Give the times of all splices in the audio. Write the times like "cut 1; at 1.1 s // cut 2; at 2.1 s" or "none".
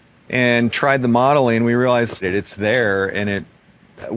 cut 1; at 2.2 s